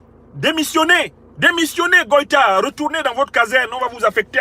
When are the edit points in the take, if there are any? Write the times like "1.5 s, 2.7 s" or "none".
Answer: 1.2 s